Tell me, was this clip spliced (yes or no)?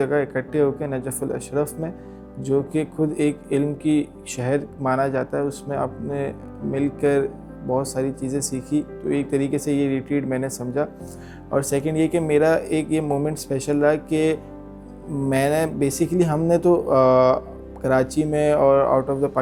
no